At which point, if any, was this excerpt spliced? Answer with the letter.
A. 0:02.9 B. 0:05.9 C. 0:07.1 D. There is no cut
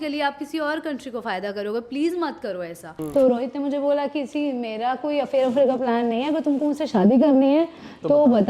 A